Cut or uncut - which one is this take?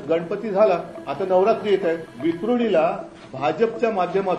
cut